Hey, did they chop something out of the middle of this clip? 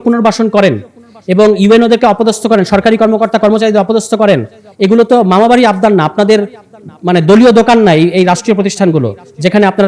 no; 0 cuts

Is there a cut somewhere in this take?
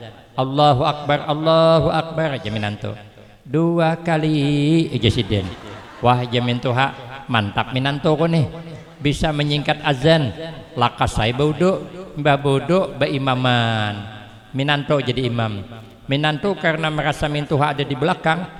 no; 0 cuts

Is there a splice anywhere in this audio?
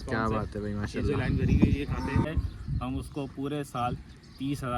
yes; 1 cut; at 2.2 s

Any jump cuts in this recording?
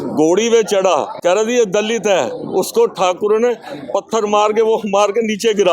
yes; 1 cut; at 1.1 s

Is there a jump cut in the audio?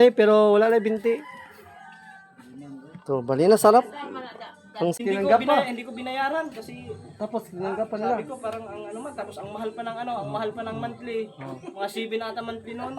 yes; 1 cut; at 4.9 s

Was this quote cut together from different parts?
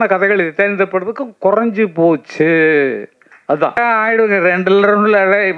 yes; 1 cut; at 3.8 s

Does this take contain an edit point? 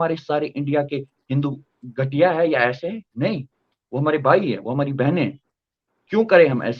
no; 0 cuts

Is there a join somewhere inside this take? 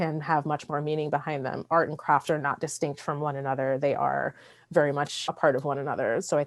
yes; 1 cut; at 5.2 s

